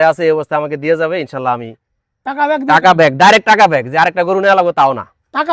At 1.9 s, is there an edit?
no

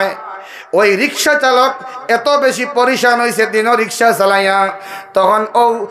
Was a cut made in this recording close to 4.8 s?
no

